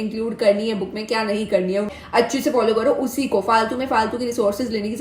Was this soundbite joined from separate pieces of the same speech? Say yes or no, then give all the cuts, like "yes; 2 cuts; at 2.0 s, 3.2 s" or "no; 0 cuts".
yes; 1 cut; at 1.9 s